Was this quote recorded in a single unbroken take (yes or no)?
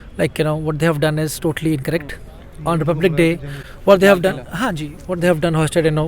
yes